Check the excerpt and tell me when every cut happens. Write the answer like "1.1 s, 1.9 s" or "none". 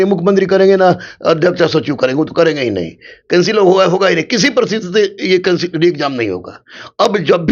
none